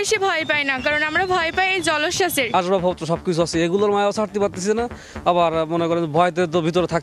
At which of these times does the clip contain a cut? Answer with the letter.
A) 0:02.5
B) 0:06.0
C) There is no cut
A